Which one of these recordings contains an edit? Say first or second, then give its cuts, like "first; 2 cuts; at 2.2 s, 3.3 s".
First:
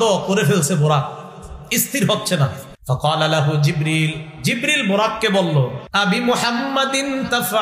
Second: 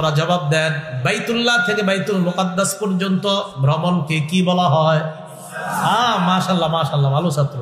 first; 2 cuts; at 2.7 s, 5.8 s